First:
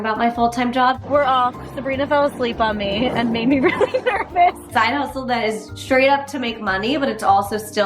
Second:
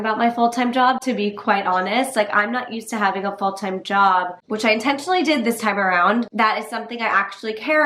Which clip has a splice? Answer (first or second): first